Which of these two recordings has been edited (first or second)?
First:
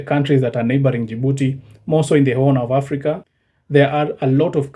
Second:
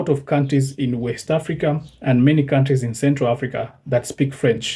first